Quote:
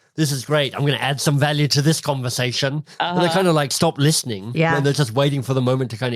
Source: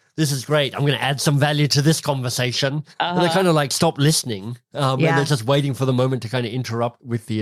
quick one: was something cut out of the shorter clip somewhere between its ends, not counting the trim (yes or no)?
yes